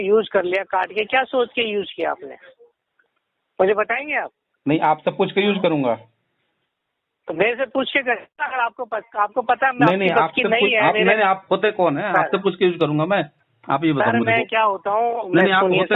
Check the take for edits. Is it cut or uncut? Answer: uncut